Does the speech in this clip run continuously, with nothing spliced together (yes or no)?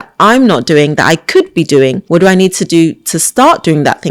no